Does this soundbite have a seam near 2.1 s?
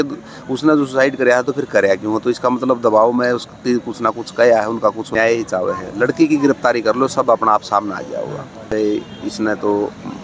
no; 2 cuts; at 5.1 s, 8.7 s

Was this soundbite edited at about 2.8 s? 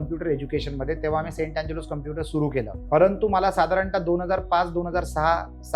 yes; 1 cut; at 2.8 s

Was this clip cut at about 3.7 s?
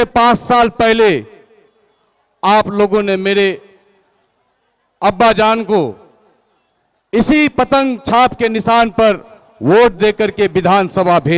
no; 0 cuts

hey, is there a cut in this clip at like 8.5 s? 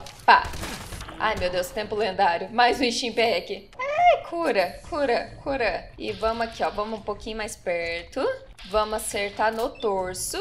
yes; 2 cuts; at 5.9 s, 8.5 s

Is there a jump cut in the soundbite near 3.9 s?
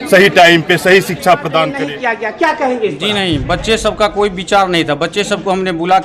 no; 1 cut; at 1.9 s

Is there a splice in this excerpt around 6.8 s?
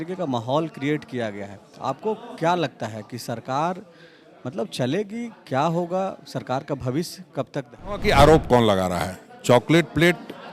no; 1 cut; at 8.0 s

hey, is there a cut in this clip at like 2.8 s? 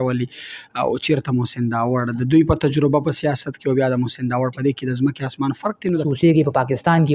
no; 1 cut; at 6.1 s

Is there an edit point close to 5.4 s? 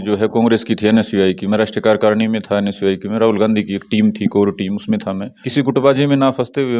yes; 1 cut; at 5.4 s

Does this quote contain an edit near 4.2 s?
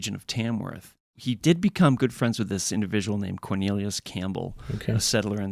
no; 1 cut; at 1.1 s

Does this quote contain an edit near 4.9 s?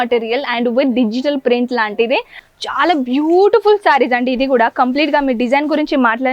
no; 1 cut; at 2.4 s

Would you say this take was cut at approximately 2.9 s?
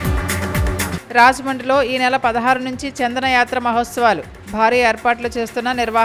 no; 1 cut; at 0.9 s

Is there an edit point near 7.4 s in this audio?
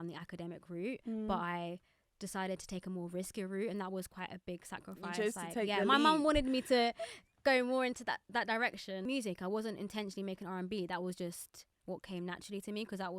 no; 1 cut; at 9.0 s

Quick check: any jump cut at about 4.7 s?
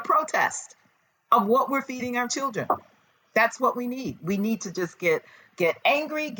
no; 0 cuts

